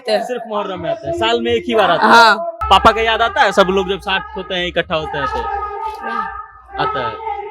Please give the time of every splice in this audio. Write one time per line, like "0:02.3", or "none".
0:02.5

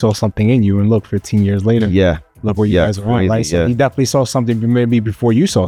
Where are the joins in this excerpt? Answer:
none

